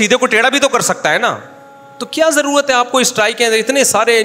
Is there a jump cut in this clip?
no; 0 cuts

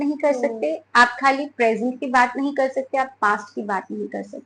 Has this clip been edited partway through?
no; 0 cuts

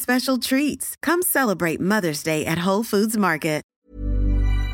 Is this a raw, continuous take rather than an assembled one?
no; 1 cut; at 3.7 s

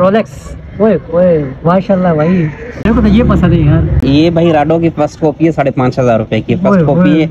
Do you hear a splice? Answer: yes; 2 cuts; at 2.9 s, 4.0 s

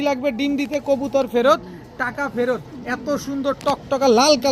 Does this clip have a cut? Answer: no; 0 cuts

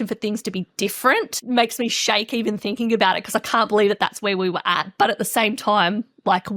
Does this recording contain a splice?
yes; 1 cut; at 1.4 s

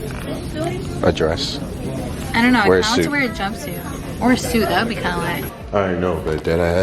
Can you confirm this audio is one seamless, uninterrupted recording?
no; 1 cut; at 5.5 s

